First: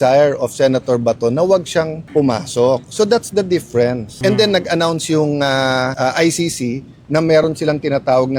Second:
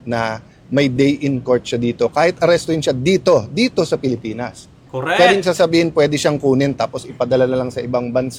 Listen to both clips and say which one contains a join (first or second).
first